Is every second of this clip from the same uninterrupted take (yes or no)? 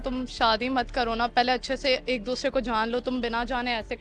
yes